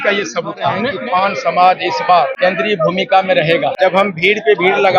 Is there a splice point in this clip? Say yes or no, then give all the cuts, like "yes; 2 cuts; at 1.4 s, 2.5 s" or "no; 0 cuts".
yes; 3 cuts; at 0.9 s, 2.3 s, 3.7 s